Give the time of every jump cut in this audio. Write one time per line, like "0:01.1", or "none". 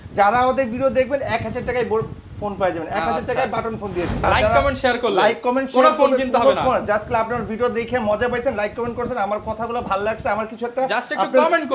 0:04.2